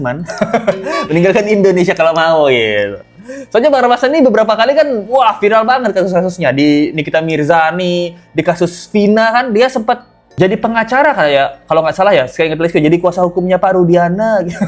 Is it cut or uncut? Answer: uncut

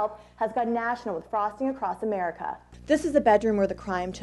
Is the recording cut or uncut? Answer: cut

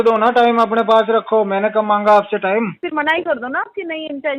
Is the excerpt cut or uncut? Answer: cut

